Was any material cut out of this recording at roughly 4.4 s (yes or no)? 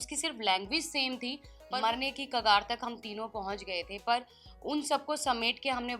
no